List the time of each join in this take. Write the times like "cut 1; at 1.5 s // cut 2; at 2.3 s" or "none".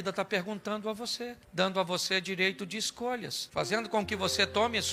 none